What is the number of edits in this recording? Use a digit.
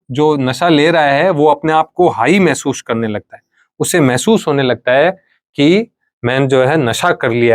0